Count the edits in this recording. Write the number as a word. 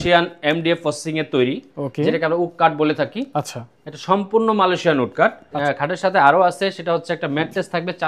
one